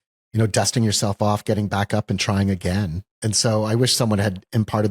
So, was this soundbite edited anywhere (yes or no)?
yes